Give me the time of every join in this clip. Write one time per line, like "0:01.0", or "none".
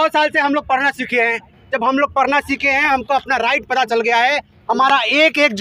none